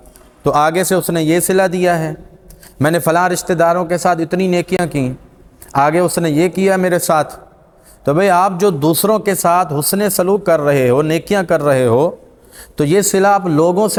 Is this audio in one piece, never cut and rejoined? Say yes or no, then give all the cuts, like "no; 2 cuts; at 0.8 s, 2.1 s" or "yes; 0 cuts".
yes; 0 cuts